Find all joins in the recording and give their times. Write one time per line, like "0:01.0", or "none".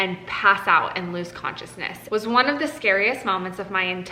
0:01.9